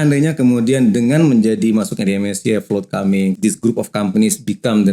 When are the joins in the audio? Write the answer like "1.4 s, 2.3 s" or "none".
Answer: 3.4 s